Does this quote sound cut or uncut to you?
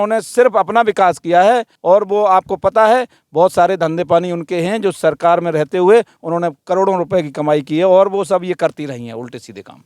uncut